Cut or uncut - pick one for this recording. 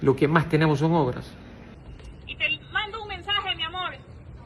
cut